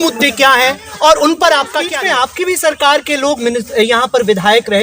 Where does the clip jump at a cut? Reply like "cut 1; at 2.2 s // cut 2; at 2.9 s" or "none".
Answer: cut 1; at 1.9 s